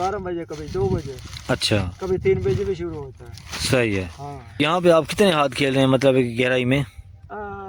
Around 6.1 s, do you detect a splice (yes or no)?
no